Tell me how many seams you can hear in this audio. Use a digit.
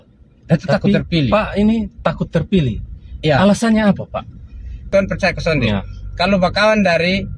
1